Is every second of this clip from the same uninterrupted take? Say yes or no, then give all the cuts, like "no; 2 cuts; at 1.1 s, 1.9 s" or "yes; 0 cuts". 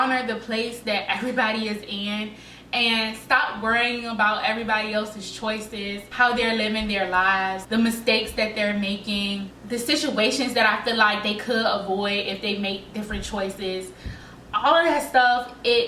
yes; 0 cuts